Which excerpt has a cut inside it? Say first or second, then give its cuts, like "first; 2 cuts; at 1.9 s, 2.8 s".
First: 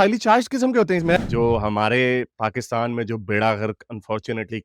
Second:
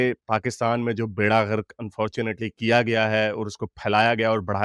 first; 1 cut; at 1.2 s